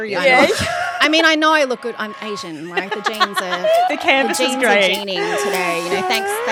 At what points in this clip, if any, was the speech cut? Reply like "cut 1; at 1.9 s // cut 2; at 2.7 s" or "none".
none